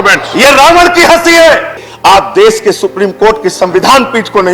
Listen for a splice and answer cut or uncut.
cut